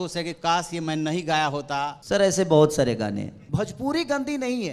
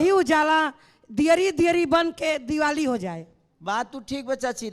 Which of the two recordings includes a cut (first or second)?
first